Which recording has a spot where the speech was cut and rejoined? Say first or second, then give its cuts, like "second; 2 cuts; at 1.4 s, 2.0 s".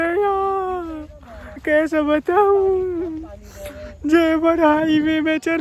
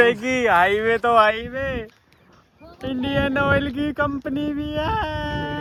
first; 1 cut; at 1.6 s